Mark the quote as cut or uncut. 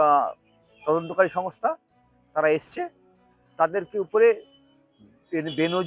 uncut